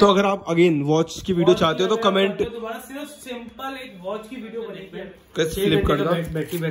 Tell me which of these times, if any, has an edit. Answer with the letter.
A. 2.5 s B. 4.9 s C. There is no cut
B